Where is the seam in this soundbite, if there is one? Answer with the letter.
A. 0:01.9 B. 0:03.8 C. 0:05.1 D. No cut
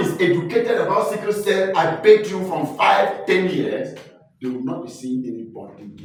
D